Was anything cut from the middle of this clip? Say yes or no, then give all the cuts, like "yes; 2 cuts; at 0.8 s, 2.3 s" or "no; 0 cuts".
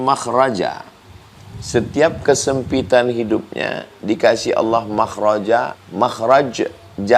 yes; 1 cut; at 5.8 s